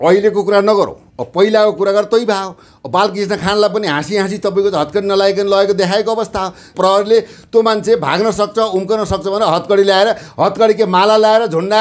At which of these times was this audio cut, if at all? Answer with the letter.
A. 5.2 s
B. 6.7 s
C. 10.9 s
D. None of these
B